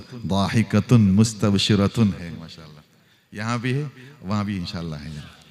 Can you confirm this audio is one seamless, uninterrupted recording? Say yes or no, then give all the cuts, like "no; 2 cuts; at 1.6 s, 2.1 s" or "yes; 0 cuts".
yes; 0 cuts